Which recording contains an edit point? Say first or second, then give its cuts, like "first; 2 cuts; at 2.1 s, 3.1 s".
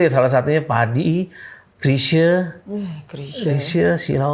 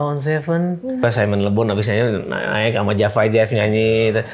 second; 1 cut; at 1.0 s